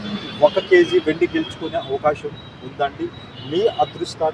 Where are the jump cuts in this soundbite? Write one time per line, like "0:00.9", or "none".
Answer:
none